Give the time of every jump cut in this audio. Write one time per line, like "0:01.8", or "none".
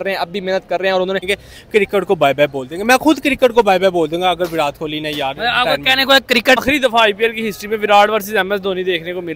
0:01.2
0:06.6

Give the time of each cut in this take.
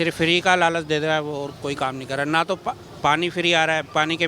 none

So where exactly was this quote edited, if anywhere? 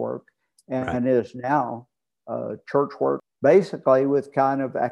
0:03.3

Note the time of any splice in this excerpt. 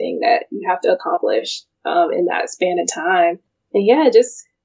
0:03.5

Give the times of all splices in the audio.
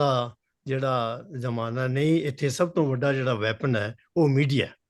none

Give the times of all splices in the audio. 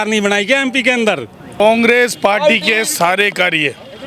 0:01.5

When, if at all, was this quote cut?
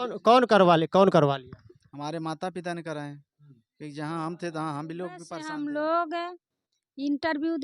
0:05.3

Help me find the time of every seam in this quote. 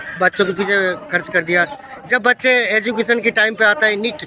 none

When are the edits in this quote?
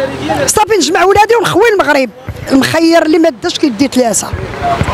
0:02.4

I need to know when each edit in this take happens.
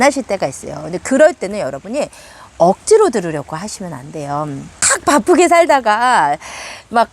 0:04.9

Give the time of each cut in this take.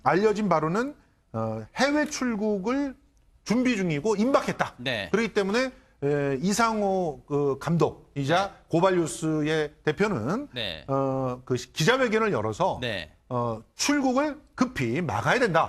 none

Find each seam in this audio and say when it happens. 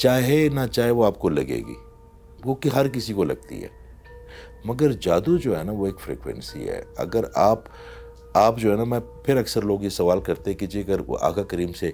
none

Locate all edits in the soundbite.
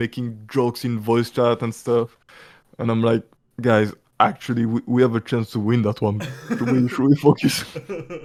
none

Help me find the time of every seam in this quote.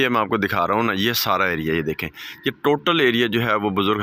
none

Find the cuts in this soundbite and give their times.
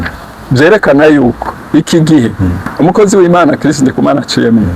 0:01.5

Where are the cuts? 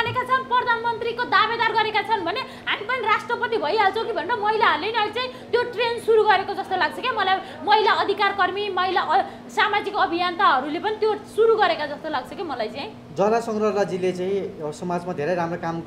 none

